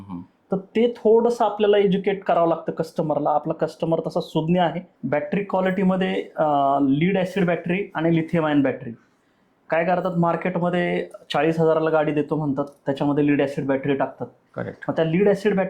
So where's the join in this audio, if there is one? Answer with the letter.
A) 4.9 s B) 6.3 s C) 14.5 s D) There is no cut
A